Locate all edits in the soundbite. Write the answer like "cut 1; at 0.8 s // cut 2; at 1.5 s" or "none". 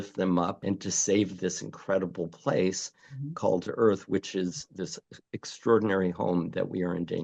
none

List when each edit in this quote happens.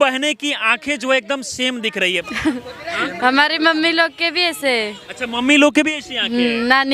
cut 1; at 2.2 s

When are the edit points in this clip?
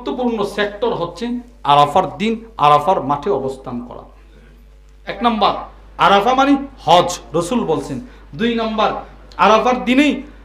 cut 1; at 5.2 s

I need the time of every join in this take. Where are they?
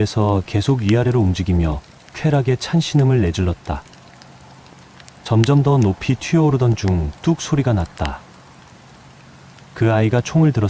cut 1; at 3.8 s // cut 2; at 5.2 s // cut 3; at 8.4 s // cut 4; at 9.7 s

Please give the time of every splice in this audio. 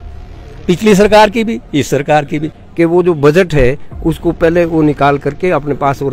cut 1; at 2.6 s

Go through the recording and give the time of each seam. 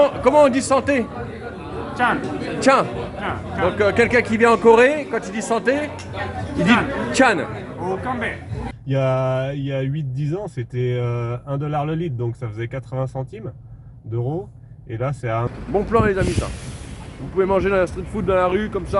cut 1; at 8.7 s // cut 2; at 15.5 s

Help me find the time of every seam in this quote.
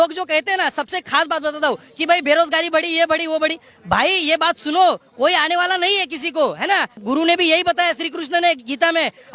cut 1; at 6.9 s

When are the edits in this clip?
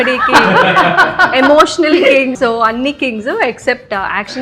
cut 1; at 2.4 s

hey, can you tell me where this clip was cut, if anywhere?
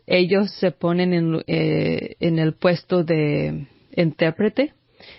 none

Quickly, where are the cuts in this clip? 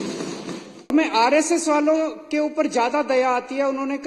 cut 1; at 0.9 s

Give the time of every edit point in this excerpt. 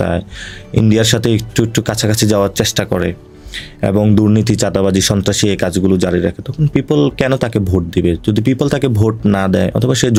none

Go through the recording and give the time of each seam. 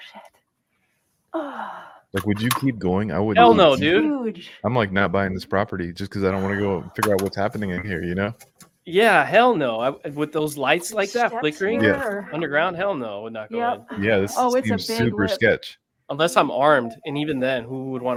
none

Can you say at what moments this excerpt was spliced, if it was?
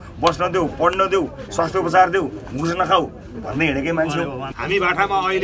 cut 1; at 4.5 s

